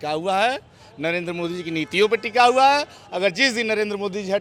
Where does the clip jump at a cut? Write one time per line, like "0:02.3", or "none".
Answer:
none